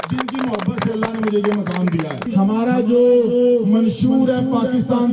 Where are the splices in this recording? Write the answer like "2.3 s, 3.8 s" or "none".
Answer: 2.3 s